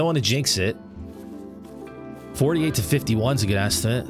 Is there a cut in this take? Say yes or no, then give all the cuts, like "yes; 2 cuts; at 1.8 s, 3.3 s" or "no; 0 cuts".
no; 0 cuts